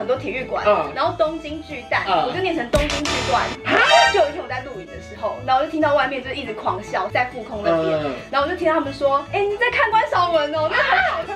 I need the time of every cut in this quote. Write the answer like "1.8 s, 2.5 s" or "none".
4.1 s, 7.1 s, 9.3 s